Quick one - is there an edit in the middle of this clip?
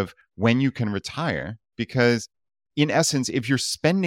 no; 0 cuts

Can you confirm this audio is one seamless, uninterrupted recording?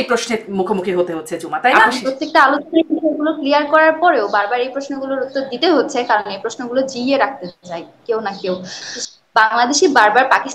no; 2 cuts; at 1.8 s, 8.9 s

